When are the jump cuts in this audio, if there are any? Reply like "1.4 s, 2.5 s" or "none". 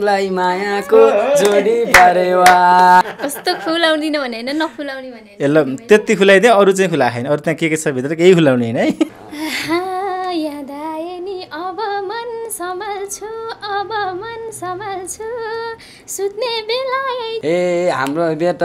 3.2 s, 9.1 s, 17.4 s